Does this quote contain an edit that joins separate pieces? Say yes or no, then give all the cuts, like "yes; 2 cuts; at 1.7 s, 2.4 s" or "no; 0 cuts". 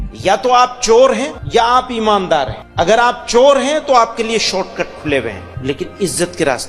yes; 3 cuts; at 1.3 s, 2.6 s, 5.5 s